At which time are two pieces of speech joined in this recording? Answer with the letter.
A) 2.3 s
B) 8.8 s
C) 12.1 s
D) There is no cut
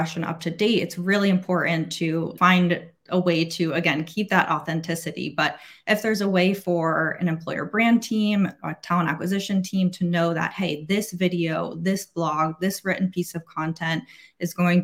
A